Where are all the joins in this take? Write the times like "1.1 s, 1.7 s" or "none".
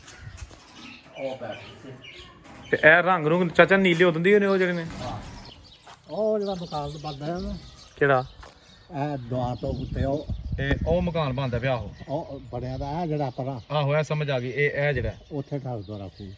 5.3 s